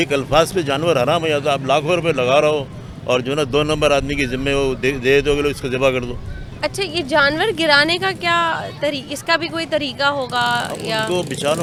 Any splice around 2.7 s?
no; 0 cuts

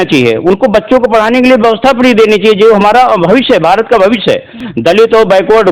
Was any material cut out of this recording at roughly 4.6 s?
yes; 1 cut; at 4.6 s

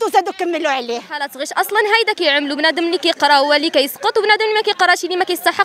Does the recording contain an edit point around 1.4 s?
yes; 1 cut; at 1.4 s

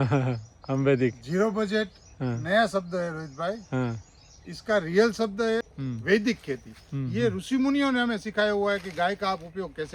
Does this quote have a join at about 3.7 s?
no; 1 cut; at 5.7 s

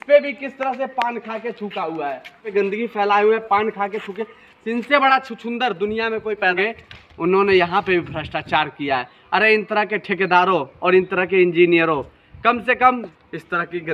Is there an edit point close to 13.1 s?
yes; 3 cuts; at 2.5 s, 6.5 s, 13.1 s

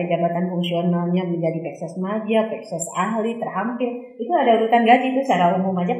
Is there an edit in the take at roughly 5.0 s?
no; 0 cuts

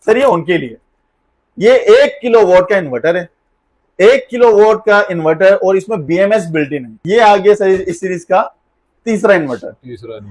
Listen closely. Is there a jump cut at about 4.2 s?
no; 1 cut; at 6.9 s

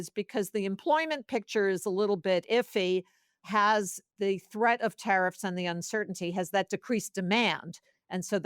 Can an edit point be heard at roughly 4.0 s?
yes; 1 cut; at 4.0 s

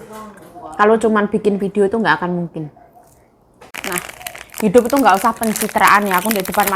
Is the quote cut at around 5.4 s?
no; 1 cut; at 3.6 s

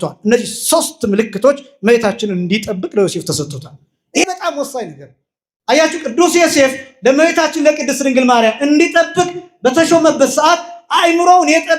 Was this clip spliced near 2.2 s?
no; 1 cut; at 4.2 s

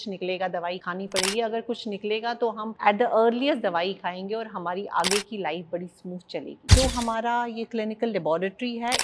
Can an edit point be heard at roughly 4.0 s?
no; 3 cuts; at 0.8 s, 2.7 s, 6.7 s

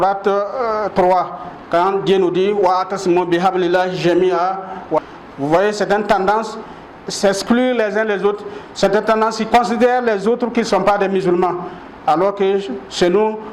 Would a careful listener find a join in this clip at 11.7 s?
no; 1 cut; at 5.0 s

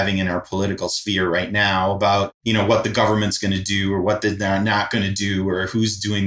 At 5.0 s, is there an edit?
no; 1 cut; at 2.4 s

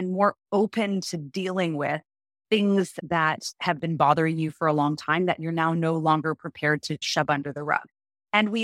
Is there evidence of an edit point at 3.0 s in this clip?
yes; 2 cuts; at 3.0 s, 7.1 s

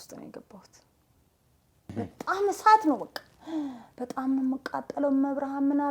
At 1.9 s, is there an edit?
yes; 1 cut; at 1.9 s

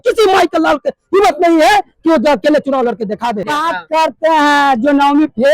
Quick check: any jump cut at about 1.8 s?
no; 1 cut; at 3.5 s

